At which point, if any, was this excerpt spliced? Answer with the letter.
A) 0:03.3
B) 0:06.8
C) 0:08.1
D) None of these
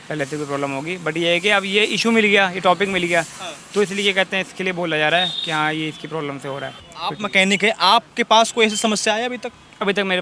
B